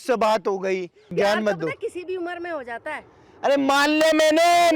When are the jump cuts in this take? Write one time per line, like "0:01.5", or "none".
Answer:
0:01.1